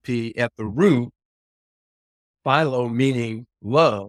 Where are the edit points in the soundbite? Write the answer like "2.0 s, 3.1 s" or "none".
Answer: none

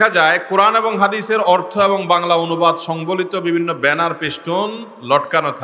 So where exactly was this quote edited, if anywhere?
none

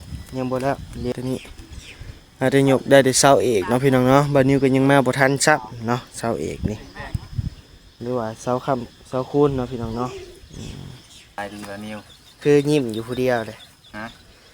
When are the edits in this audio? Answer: 1.1 s, 11.4 s

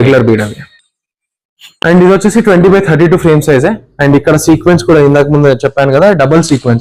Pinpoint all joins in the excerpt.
none

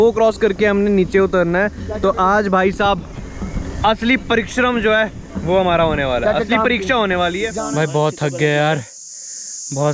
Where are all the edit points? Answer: 7.5 s

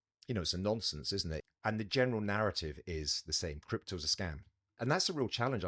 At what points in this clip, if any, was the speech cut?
1.5 s, 4.8 s

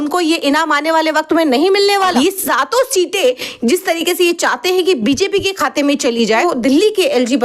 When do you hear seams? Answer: 2.1 s, 6.4 s

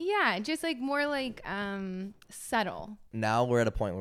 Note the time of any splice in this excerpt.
3.1 s

